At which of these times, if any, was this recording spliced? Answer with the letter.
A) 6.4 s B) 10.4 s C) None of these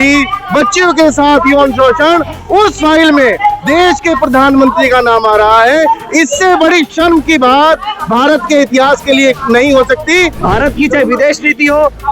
B